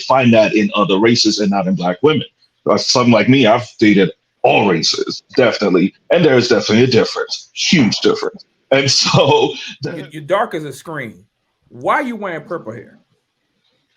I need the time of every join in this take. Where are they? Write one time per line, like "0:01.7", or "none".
0:09.7